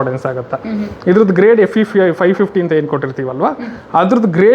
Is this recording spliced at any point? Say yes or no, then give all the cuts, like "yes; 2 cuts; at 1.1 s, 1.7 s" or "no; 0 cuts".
no; 0 cuts